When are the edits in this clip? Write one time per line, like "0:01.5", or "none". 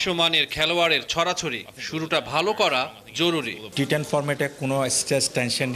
0:03.6